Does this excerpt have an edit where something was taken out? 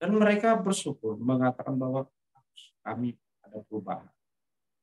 no; 0 cuts

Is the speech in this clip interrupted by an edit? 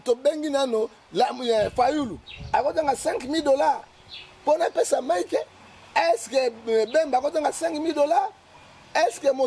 no; 0 cuts

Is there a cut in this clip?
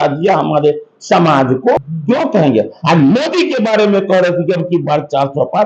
yes; 1 cut; at 1.8 s

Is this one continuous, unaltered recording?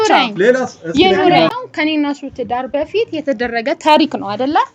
no; 1 cut; at 1.5 s

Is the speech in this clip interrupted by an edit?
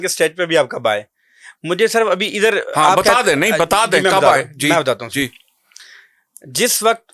no; 0 cuts

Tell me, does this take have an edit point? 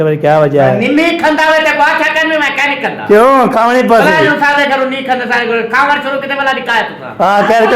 no; 0 cuts

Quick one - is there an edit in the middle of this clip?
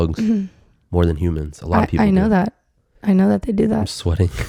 no; 0 cuts

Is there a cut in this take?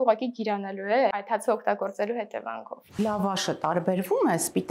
yes; 1 cut; at 3.0 s

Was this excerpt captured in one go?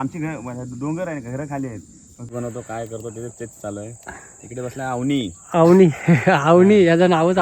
no; 1 cut; at 2.3 s

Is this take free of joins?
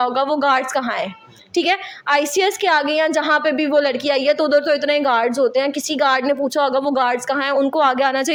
yes; 0 cuts

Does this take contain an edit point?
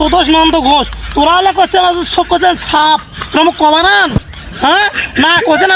no; 0 cuts

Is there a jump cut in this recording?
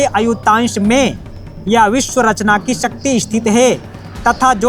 no; 0 cuts

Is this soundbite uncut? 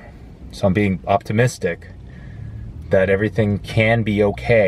yes; 0 cuts

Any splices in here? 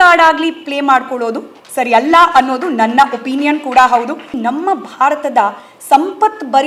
yes; 1 cut; at 4.3 s

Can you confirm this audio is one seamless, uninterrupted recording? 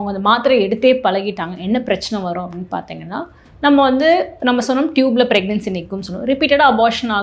yes; 0 cuts

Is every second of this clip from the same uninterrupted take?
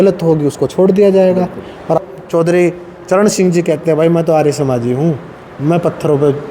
no; 1 cut; at 2.0 s

